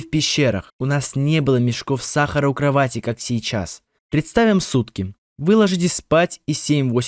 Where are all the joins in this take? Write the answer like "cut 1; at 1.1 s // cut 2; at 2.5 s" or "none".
cut 1; at 3.8 s